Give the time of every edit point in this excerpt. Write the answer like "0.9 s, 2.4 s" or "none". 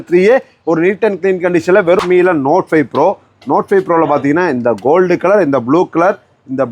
2.0 s